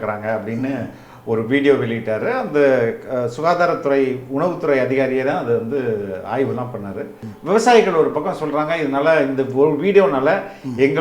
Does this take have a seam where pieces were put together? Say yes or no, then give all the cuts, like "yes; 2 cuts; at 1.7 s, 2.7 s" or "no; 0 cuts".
yes; 1 cut; at 7.3 s